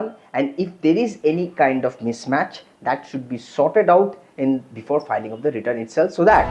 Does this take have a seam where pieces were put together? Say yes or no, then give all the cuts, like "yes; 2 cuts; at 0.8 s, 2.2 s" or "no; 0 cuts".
no; 0 cuts